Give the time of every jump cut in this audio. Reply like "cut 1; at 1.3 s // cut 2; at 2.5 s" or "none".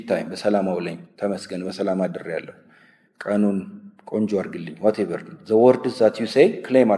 none

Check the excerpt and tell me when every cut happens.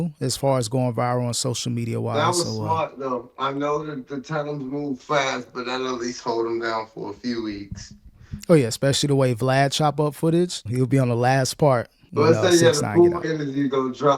cut 1; at 10.6 s // cut 2; at 12.0 s

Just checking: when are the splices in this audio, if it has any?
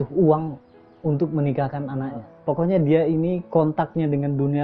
cut 1; at 2.3 s

